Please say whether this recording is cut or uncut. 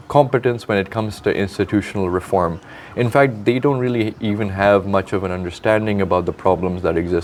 uncut